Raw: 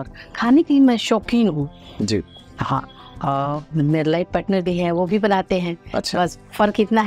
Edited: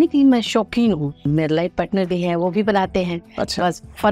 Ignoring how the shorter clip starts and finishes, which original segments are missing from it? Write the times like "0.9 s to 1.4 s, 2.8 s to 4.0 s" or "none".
1.8 s to 3.8 s